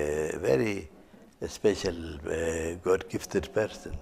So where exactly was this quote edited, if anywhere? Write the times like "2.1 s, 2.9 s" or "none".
none